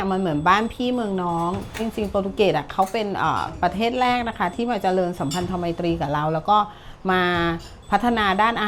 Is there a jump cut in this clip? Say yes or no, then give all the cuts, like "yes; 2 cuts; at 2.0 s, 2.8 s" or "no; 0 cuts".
yes; 1 cut; at 1.9 s